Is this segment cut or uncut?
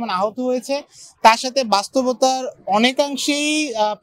uncut